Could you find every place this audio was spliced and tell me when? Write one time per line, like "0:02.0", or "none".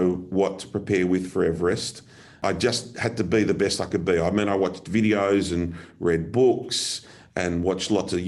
0:02.4